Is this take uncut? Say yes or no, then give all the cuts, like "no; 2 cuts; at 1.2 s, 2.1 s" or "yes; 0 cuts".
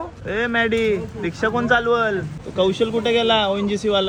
yes; 0 cuts